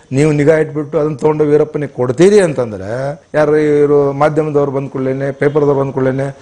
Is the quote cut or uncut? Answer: cut